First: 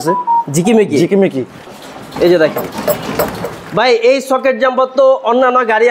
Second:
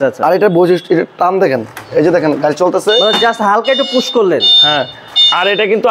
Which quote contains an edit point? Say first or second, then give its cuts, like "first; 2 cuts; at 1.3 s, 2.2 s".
first; 1 cut; at 1.7 s